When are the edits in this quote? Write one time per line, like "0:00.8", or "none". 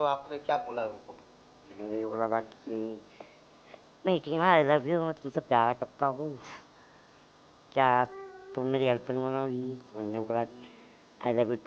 none